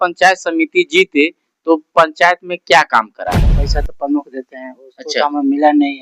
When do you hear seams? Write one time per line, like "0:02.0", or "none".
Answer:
0:03.6